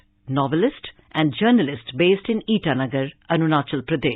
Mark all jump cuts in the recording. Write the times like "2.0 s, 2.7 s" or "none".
none